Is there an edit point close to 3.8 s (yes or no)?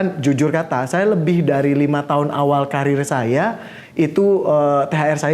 no